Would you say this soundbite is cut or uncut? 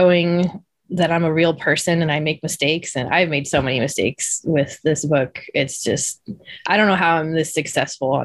uncut